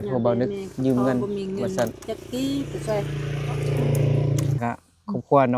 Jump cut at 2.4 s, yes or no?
no